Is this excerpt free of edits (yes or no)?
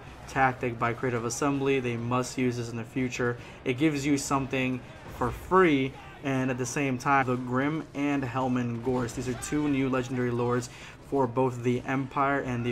yes